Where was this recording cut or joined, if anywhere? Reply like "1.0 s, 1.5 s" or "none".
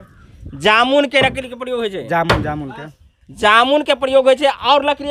none